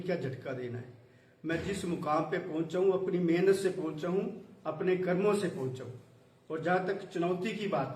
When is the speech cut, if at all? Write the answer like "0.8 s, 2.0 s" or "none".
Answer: 3.2 s